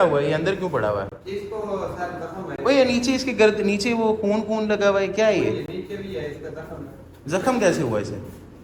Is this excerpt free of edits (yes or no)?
yes